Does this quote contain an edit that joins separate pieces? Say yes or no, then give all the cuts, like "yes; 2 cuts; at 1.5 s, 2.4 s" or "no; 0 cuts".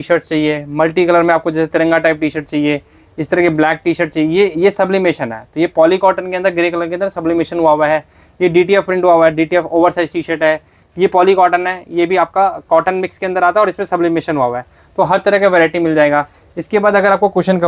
no; 0 cuts